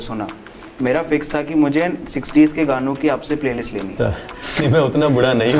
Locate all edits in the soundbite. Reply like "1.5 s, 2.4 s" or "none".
3.9 s